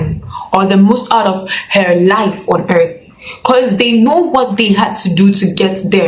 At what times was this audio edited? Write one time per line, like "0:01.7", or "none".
none